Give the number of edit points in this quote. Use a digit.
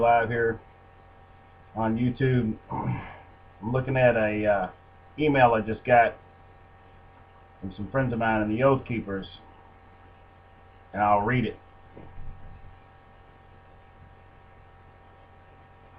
1